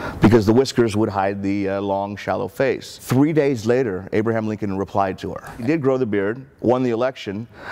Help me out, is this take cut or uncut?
cut